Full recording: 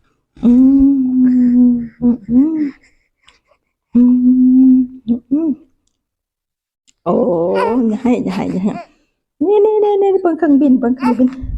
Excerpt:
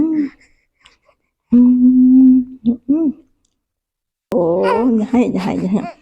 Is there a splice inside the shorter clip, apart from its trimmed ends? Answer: yes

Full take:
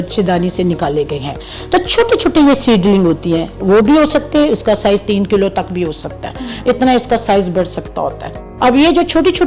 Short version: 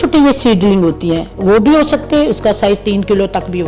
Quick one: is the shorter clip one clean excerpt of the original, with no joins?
yes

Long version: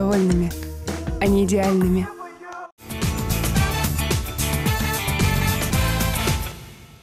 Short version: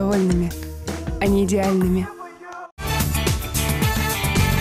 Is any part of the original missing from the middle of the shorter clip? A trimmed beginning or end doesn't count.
yes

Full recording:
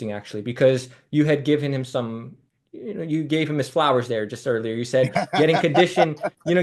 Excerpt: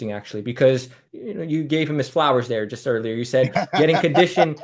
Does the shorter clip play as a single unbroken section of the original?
no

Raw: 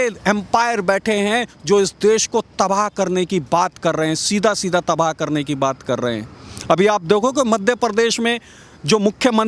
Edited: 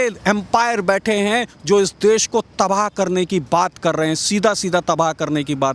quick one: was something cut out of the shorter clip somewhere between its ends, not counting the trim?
no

